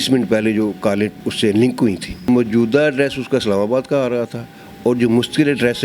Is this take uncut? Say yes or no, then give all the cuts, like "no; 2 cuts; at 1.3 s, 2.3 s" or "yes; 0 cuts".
no; 2 cuts; at 1.2 s, 2.3 s